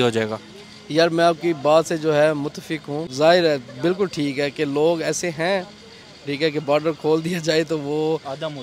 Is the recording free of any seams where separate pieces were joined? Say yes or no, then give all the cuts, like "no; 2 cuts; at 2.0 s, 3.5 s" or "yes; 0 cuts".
no; 1 cut; at 3.0 s